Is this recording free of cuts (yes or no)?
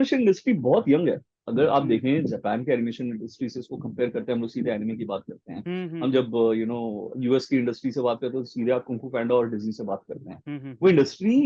yes